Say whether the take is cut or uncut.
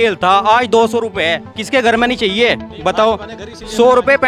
uncut